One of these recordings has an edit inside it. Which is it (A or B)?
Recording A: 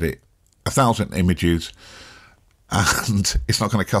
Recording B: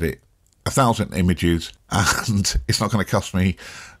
B